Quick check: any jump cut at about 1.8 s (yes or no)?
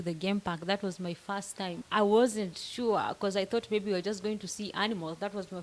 yes